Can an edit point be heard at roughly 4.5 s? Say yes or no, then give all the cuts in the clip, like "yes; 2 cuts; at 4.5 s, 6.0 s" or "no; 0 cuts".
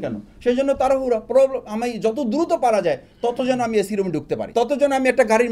yes; 1 cut; at 4.5 s